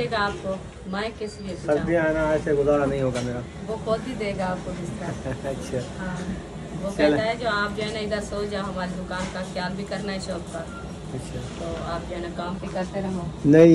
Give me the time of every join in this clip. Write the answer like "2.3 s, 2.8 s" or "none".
none